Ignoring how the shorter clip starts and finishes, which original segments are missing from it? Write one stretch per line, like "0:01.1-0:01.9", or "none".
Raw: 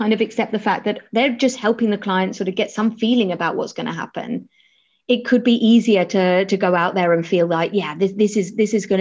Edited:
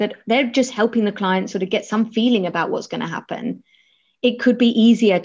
none